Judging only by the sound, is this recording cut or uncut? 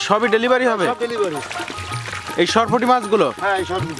uncut